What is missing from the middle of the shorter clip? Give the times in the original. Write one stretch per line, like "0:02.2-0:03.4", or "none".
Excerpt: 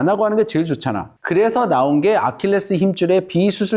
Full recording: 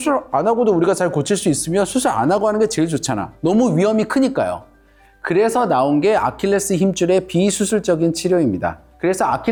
0:03.3-0:05.0